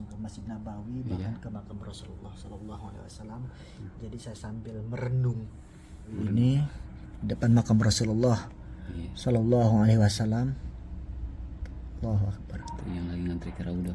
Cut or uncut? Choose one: cut